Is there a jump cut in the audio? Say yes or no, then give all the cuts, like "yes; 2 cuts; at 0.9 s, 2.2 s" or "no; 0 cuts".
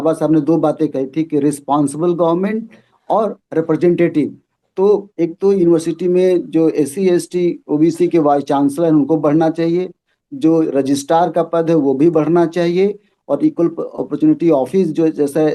no; 0 cuts